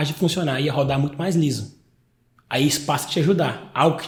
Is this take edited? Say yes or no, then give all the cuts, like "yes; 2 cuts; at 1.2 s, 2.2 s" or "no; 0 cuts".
no; 0 cuts